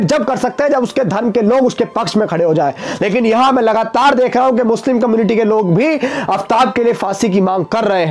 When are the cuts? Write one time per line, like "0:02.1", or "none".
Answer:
none